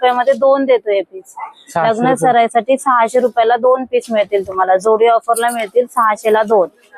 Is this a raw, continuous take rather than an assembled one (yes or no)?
yes